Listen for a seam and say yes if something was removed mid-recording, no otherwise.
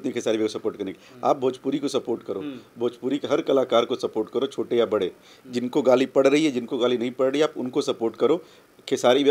no